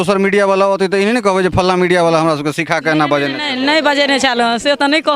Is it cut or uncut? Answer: uncut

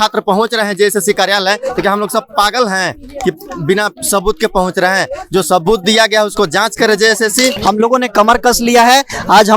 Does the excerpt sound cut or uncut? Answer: cut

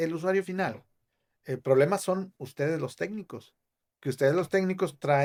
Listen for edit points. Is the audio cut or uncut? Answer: uncut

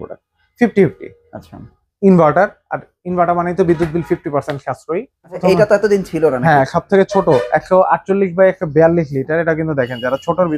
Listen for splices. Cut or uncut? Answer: cut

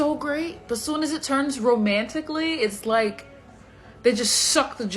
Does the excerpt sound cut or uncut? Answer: cut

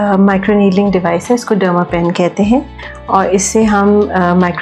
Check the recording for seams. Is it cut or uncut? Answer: uncut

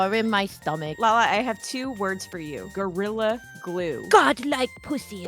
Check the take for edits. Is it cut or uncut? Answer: cut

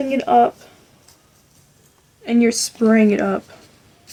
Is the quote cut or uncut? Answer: uncut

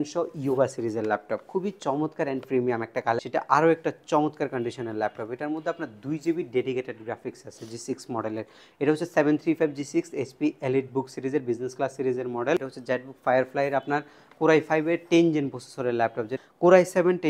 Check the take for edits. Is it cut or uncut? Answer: cut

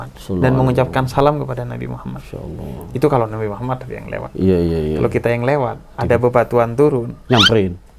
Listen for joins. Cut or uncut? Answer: uncut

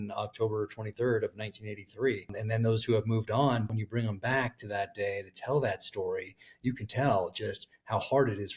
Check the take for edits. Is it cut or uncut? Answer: cut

